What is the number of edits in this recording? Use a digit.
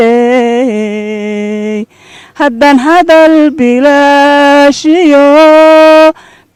0